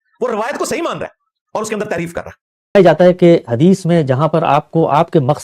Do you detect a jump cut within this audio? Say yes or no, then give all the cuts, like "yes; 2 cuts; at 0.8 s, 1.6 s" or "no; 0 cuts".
yes; 1 cut; at 2.7 s